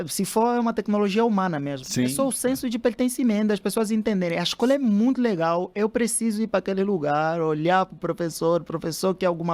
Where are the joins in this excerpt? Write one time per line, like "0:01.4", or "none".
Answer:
none